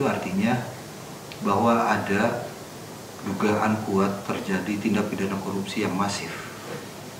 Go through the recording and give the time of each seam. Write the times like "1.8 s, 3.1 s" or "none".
none